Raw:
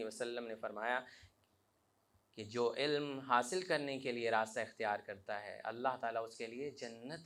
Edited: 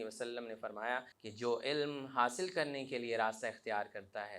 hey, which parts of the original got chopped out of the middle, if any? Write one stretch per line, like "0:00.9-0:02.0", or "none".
0:01.2-0:02.3

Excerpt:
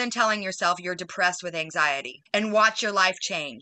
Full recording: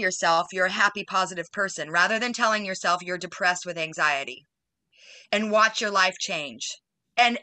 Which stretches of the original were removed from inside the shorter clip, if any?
0:04.4-0:05.1

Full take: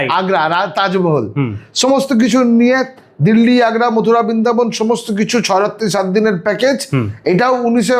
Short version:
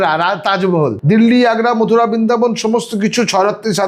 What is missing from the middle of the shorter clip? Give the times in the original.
0:01.3-0:03.1

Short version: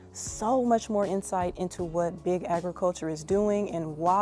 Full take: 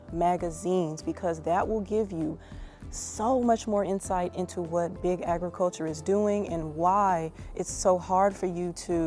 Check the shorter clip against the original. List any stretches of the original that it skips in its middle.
none

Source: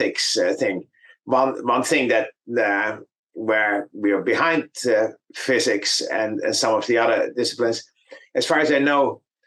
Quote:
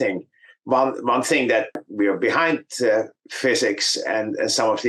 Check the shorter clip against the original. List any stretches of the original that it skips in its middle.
0:02.4-0:03.9

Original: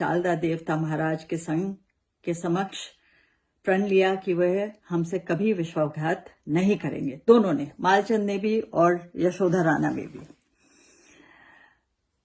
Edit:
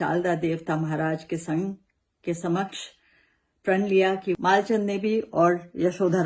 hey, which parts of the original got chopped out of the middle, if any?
0:04.3-0:07.7

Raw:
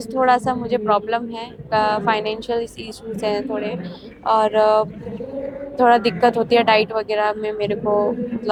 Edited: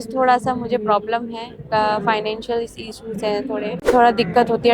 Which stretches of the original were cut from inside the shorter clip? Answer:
0:03.8-0:05.6

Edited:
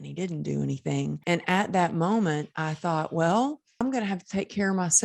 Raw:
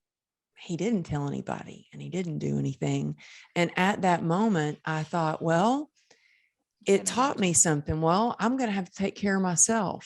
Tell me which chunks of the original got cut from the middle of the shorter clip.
0:03.1-0:03.5
0:06.1-0:08.5

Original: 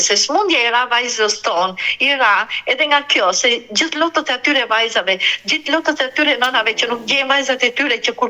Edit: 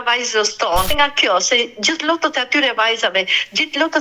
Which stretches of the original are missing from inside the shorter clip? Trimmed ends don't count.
0:01.7-0:02.8

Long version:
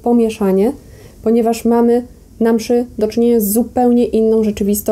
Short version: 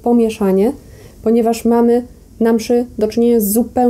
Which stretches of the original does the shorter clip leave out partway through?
none

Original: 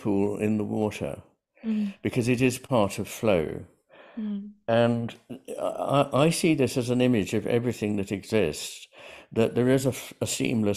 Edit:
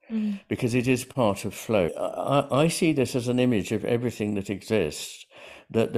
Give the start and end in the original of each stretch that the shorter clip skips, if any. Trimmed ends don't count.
0:03.5-0:05.6

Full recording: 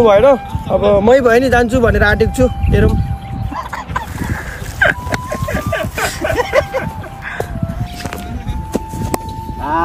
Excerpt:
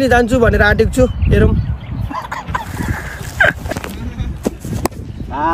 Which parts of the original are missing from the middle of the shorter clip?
0:05.1-0:08.0

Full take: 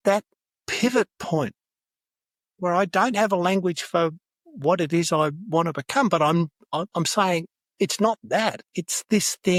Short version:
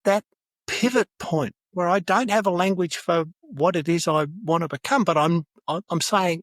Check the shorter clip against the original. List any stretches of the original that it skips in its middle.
0:01.6-0:02.5
0:04.3-0:04.5

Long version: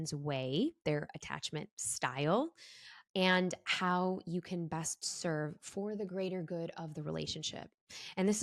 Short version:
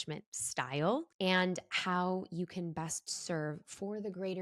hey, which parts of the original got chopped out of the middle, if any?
0:02.6-0:03.1

